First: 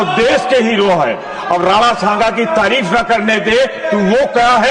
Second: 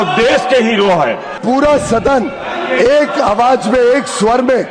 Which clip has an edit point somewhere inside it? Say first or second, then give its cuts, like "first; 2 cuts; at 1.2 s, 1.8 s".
second; 1 cut; at 1.4 s